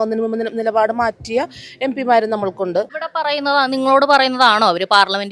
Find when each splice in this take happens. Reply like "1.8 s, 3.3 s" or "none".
2.9 s